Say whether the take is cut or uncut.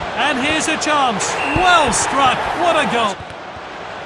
cut